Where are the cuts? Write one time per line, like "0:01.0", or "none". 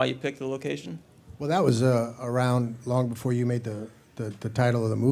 0:03.1